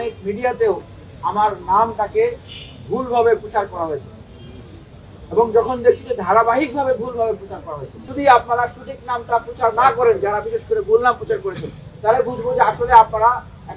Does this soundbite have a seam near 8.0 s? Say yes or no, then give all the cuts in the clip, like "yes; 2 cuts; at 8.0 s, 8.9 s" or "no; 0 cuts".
yes; 1 cut; at 8.0 s